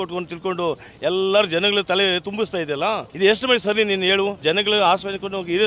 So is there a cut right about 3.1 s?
yes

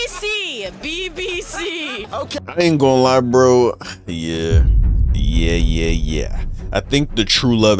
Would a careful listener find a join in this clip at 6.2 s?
no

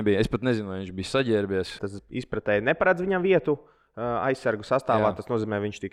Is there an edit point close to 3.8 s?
no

